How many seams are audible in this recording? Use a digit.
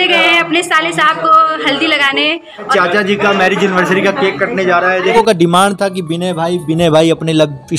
2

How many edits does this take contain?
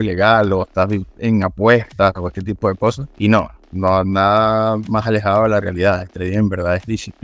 1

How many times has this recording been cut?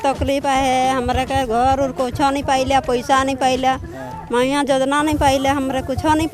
0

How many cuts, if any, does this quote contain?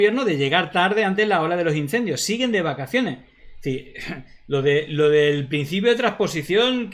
0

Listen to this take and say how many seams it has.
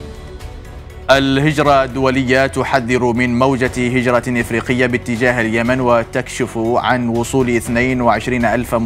1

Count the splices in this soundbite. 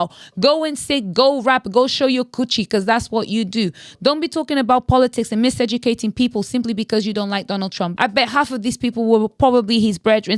1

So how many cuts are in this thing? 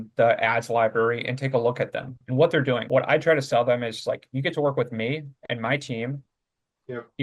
1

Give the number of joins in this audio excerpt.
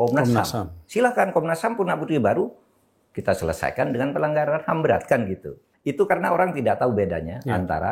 1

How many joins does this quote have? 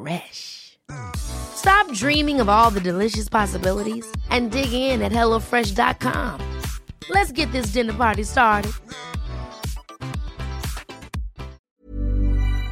1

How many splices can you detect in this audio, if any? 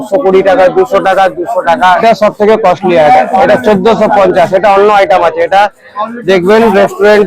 1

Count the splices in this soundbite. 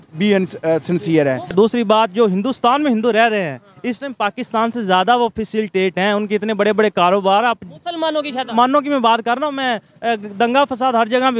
1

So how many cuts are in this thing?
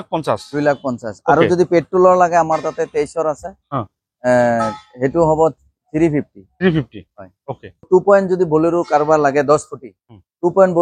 1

